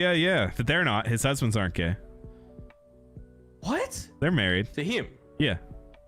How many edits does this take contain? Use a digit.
1